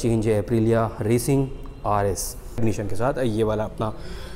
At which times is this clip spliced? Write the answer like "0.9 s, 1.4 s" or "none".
2.6 s